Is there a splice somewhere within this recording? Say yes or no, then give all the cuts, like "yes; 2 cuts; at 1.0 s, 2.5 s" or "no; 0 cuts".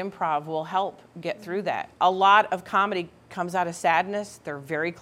yes; 1 cut; at 1.9 s